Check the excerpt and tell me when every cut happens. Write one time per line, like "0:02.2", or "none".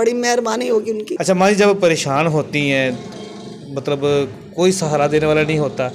0:01.1